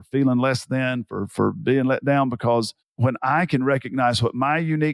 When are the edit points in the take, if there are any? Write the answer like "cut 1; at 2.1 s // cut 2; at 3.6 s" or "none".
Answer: cut 1; at 2.8 s